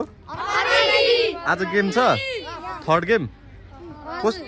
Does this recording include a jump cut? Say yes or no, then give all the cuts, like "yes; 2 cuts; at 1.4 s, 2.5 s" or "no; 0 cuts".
no; 0 cuts